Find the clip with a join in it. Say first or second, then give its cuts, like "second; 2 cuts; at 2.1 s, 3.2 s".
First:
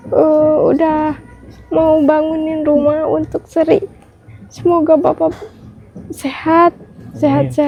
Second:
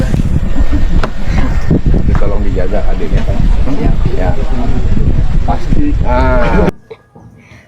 second; 1 cut; at 6.7 s